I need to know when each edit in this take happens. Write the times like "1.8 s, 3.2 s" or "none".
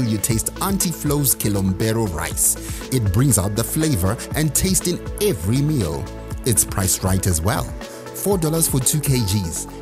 none